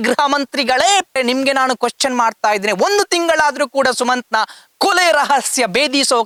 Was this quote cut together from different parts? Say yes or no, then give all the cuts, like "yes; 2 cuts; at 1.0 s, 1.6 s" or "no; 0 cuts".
no; 0 cuts